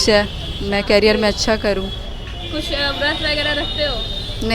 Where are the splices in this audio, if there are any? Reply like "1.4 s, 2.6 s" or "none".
none